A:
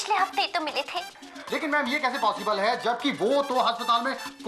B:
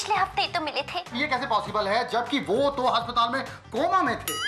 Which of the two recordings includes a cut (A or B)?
B